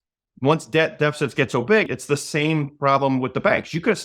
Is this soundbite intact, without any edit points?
no; 1 cut; at 1.9 s

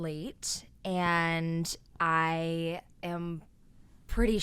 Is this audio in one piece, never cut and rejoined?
yes; 0 cuts

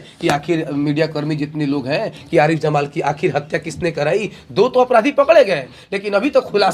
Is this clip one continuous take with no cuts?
yes; 0 cuts

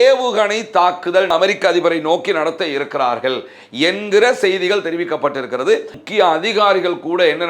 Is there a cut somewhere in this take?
yes; 2 cuts; at 1.3 s, 6.0 s

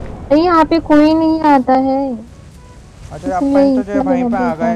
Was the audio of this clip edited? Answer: no; 0 cuts

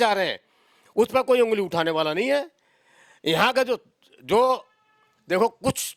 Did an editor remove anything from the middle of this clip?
no; 0 cuts

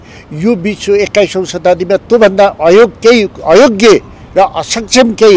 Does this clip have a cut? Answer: no; 0 cuts

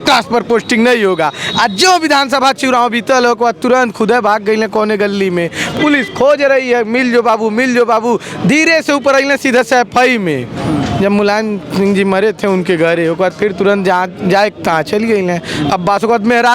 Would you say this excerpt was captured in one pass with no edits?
yes; 0 cuts

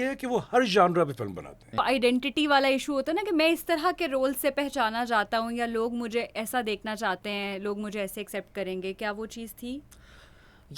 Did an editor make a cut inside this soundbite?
yes; 1 cut; at 1.8 s

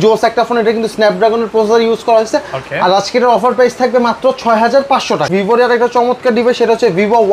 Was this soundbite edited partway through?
yes; 1 cut; at 5.3 s

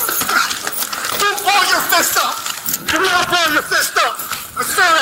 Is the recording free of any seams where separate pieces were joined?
yes; 0 cuts

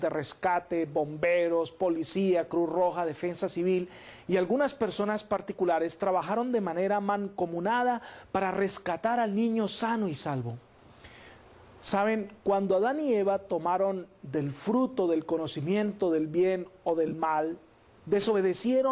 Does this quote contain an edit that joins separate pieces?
no; 0 cuts

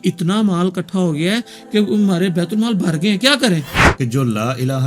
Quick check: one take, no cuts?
no; 1 cut; at 3.8 s

